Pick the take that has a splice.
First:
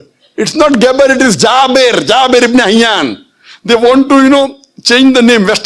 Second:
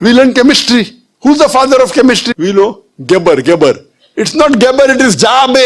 second; 1 cut; at 2.3 s

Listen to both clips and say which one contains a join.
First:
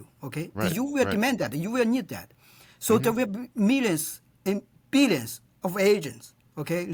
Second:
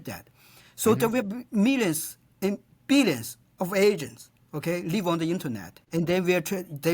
second; 1 cut; at 5.8 s

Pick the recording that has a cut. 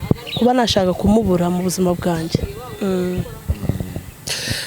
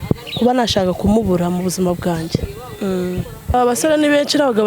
second; 1 cut; at 3.5 s

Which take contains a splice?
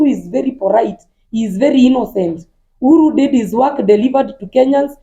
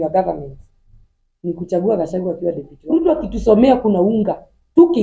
second; 1 cut; at 2.7 s

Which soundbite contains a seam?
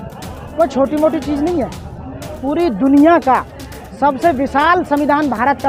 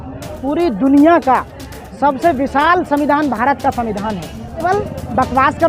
second; 1 cut; at 4.6 s

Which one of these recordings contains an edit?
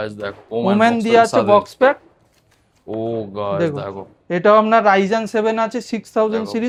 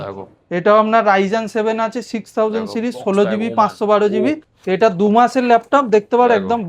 second; 1 cut; at 4.5 s

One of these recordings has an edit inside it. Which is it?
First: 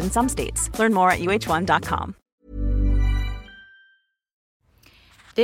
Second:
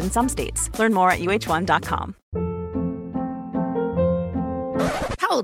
second; 1 cut; at 2.2 s

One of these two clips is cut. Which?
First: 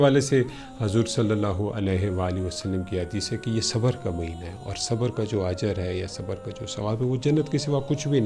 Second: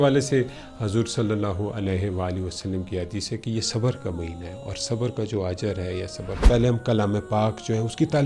second; 1 cut; at 6.4 s

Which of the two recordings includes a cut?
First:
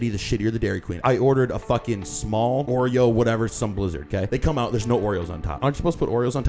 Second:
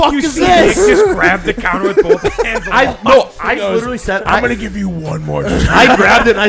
first; 4 cuts; at 1.0 s, 2.7 s, 4.3 s, 5.6 s

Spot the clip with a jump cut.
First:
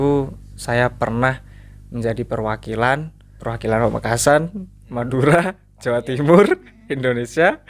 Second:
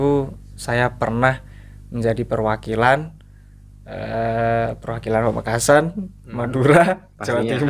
first; 1 cut; at 3.4 s

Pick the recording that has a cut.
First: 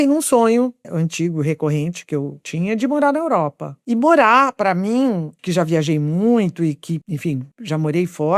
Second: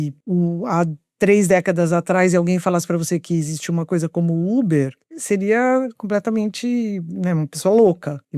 first; 4 cuts; at 0.8 s, 2.4 s, 3.7 s, 5.3 s

